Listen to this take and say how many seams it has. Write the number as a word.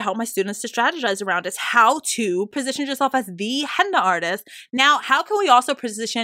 one